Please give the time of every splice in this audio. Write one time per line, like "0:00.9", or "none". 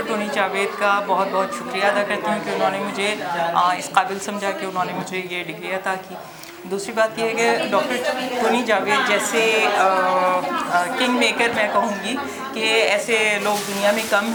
none